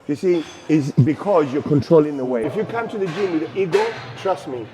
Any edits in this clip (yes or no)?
yes